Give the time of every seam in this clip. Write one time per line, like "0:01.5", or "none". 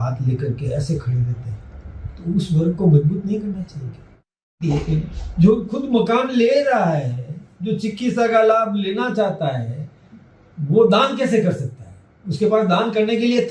0:04.4